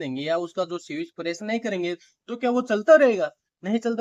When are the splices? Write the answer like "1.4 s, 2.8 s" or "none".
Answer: none